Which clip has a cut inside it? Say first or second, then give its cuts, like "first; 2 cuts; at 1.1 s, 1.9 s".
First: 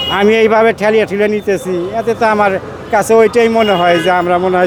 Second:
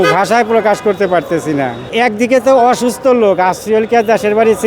second; 1 cut; at 1.9 s